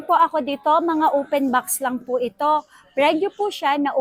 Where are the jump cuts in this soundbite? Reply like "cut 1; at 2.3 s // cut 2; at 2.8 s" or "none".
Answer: none